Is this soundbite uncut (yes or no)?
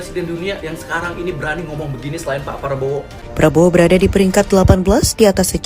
no